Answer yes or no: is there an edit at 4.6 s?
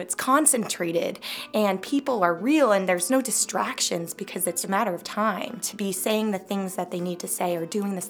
yes